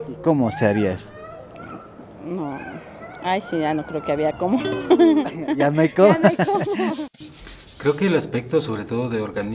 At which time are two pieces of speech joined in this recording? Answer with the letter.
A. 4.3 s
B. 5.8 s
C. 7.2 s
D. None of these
C